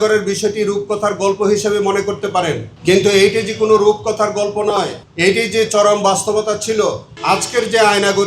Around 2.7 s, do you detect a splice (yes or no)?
yes